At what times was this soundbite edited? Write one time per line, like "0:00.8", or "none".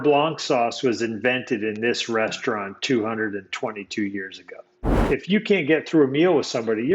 0:05.0